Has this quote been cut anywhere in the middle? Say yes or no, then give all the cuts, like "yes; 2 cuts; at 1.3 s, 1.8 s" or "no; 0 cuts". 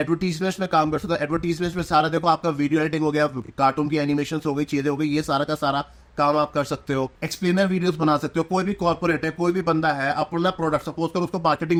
no; 0 cuts